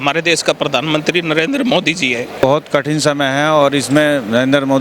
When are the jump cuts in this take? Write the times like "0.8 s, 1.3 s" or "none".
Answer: 2.4 s